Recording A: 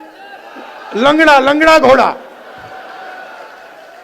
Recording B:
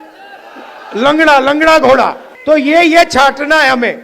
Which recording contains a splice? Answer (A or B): B